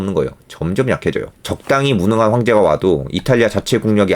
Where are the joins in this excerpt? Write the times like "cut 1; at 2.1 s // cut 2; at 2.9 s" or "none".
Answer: cut 1; at 1.3 s